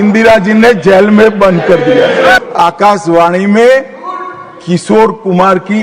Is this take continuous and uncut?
no; 1 cut; at 2.4 s

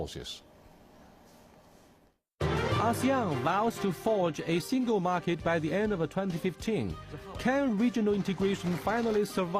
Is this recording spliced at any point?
yes; 1 cut; at 6.8 s

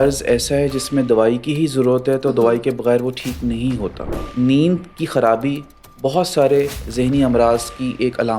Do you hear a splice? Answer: yes; 1 cut; at 4.2 s

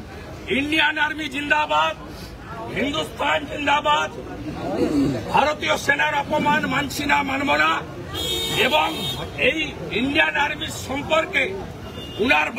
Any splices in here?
no; 0 cuts

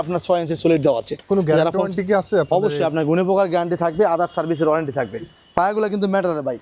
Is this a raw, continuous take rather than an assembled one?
yes; 0 cuts

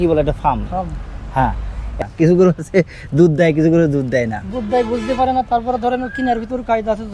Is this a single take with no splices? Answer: no; 1 cut; at 1.9 s

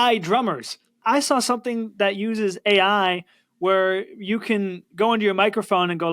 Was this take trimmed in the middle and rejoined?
yes; 1 cut; at 1.0 s

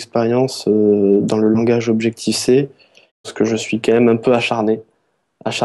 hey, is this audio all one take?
no; 1 cut; at 3.3 s

